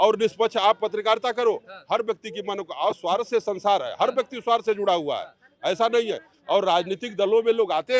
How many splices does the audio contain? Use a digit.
0